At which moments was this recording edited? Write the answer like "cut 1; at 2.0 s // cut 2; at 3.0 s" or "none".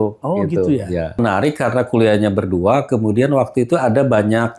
cut 1; at 1.2 s

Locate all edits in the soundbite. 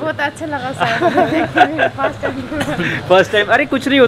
none

